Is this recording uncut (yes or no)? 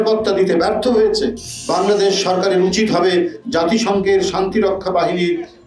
no